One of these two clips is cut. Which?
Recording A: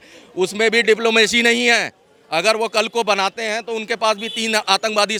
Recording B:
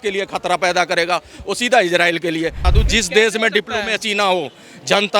B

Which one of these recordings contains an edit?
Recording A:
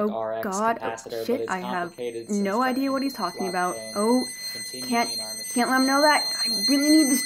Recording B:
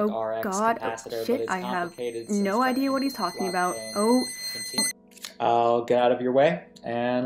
B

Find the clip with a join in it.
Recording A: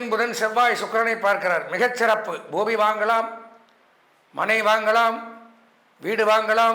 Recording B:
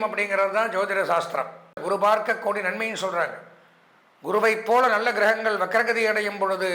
B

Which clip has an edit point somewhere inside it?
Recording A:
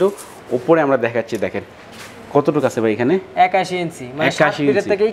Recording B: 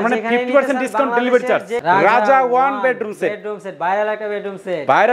B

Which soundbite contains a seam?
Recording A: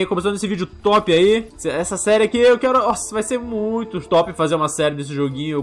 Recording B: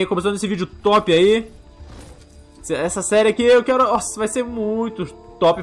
A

